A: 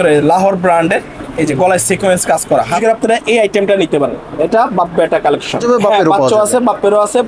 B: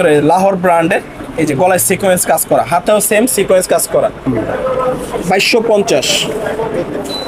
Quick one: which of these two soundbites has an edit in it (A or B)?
A